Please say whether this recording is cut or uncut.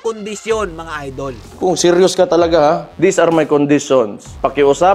cut